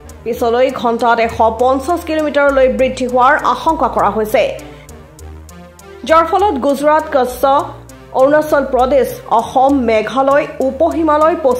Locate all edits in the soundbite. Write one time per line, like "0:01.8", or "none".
0:04.6
0:06.0